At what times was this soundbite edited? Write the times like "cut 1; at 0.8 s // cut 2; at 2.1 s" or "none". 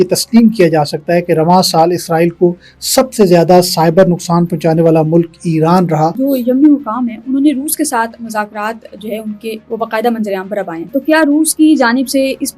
cut 1; at 6.2 s // cut 2; at 10.9 s

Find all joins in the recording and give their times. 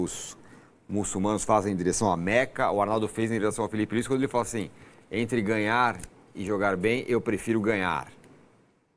none

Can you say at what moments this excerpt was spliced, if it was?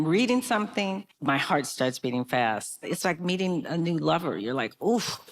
cut 1; at 1.1 s // cut 2; at 2.8 s

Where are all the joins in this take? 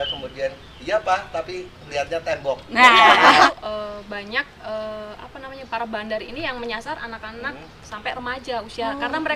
cut 1; at 3.5 s

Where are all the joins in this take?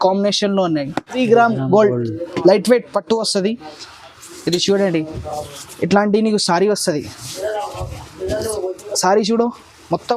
cut 1; at 1.2 s

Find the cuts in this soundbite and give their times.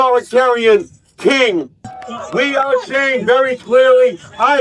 cut 1; at 1.9 s

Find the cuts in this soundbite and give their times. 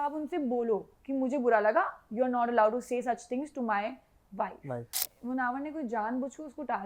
cut 1; at 5.0 s

